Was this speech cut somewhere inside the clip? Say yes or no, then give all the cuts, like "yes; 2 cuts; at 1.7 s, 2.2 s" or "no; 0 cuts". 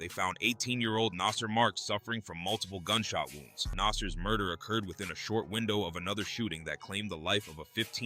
yes; 1 cut; at 3.7 s